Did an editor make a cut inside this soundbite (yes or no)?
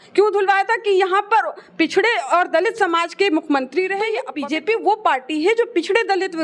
yes